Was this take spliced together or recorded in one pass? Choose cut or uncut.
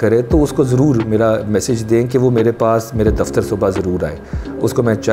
uncut